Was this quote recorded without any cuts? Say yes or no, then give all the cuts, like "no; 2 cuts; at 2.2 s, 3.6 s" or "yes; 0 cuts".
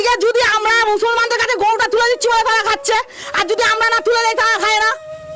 yes; 0 cuts